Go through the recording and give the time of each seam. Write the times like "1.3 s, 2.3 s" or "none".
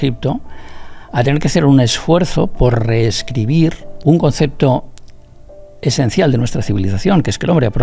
4.0 s